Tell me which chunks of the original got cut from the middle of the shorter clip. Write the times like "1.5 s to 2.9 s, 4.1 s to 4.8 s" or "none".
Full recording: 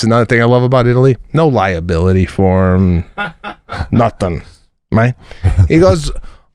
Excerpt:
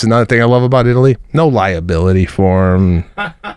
none